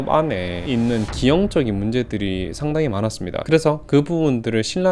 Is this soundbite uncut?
yes; 0 cuts

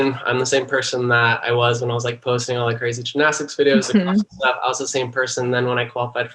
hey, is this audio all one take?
yes; 0 cuts

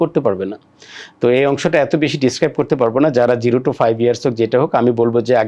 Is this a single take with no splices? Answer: yes; 0 cuts

